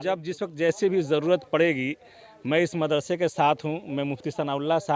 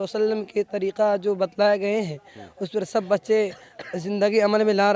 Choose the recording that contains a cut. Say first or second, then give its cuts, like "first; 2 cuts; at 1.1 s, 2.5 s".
second; 1 cut; at 3.7 s